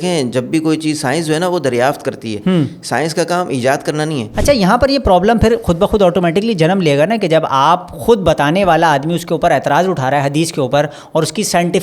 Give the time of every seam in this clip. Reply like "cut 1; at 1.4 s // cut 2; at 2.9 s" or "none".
cut 1; at 4.3 s